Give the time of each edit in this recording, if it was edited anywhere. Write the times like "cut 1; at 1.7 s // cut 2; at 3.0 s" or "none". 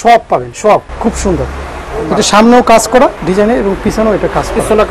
cut 1; at 0.9 s // cut 2; at 3.2 s